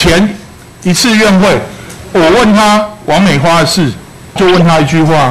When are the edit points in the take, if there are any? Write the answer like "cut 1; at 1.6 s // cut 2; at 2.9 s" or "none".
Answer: cut 1; at 4.4 s